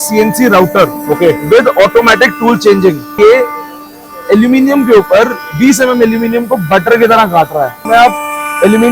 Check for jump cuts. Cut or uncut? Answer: cut